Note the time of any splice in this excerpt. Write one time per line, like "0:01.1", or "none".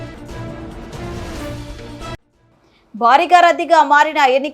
0:01.8